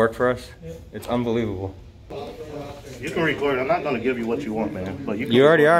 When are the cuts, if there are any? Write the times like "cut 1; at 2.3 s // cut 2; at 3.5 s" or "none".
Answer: cut 1; at 2.2 s